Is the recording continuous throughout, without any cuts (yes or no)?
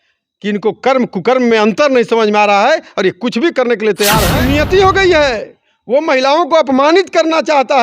no